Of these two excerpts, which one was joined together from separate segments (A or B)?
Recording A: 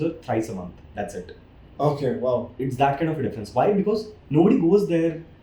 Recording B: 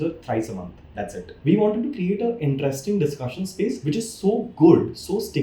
B